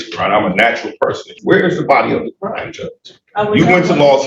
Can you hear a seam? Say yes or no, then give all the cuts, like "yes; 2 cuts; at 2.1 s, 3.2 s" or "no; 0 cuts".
yes; 1 cut; at 1.3 s